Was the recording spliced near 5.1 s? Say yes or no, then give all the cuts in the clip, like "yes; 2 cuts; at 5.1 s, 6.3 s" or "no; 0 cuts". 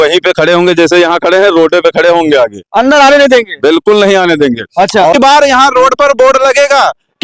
yes; 1 cut; at 5.1 s